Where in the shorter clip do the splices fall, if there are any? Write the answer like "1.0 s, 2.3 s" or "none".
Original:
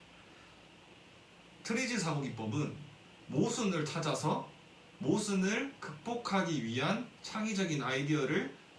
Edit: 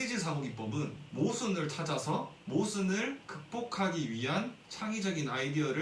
1.0 s, 2.4 s